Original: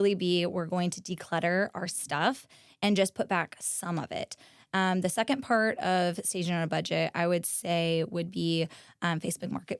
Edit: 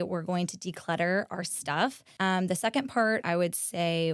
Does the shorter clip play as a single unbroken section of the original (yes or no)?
no